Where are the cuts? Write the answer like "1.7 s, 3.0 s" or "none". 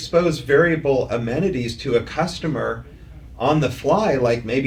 none